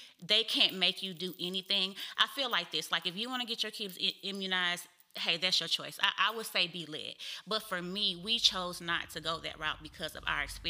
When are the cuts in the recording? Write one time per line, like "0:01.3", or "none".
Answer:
none